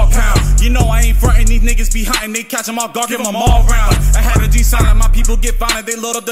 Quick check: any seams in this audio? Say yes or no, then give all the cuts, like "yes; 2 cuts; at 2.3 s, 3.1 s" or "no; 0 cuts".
no; 0 cuts